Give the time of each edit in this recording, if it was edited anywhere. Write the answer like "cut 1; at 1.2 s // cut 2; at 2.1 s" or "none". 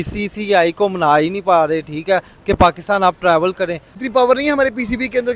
none